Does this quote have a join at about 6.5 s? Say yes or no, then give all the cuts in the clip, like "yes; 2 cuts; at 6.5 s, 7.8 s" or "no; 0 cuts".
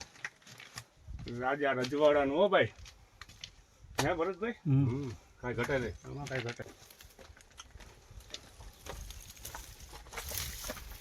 yes; 1 cut; at 6.5 s